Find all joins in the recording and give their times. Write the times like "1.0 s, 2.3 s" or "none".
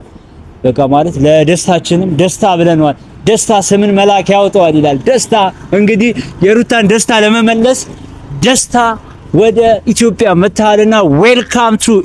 none